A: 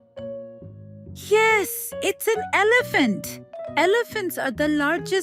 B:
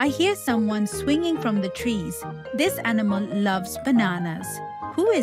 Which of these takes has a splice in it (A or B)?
A